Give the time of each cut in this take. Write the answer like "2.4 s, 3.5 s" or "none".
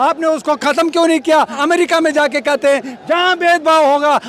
1.6 s